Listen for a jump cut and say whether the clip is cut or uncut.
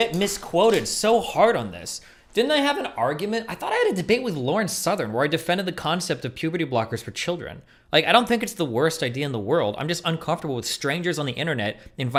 uncut